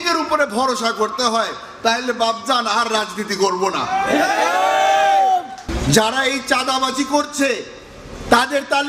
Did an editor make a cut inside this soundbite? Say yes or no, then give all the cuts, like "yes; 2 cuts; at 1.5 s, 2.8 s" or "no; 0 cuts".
yes; 1 cut; at 5.6 s